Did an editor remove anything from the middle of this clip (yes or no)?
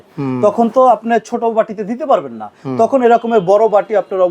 no